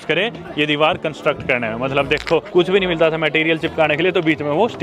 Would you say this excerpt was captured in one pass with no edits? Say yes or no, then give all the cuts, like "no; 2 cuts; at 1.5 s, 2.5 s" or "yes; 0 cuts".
yes; 0 cuts